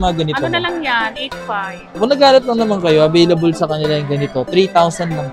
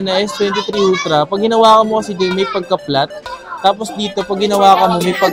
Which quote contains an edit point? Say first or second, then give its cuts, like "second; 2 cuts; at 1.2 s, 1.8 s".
first; 1 cut; at 2.0 s